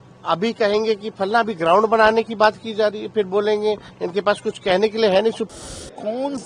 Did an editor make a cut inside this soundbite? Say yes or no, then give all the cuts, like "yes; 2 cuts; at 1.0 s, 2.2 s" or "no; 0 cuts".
yes; 1 cut; at 5.5 s